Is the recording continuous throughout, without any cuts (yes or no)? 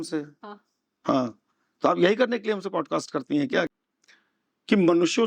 no